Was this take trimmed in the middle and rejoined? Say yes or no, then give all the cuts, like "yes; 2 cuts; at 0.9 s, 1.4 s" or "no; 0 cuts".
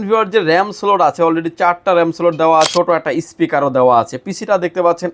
yes; 1 cut; at 2.7 s